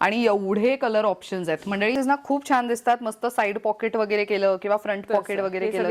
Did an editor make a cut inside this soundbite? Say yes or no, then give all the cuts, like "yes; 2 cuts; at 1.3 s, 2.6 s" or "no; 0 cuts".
yes; 1 cut; at 2.0 s